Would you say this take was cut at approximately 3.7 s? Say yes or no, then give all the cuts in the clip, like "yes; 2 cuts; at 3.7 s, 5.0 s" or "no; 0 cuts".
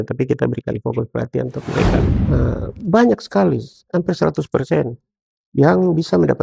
no; 1 cut; at 2.2 s